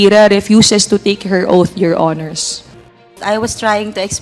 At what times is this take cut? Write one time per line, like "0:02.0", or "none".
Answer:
0:03.2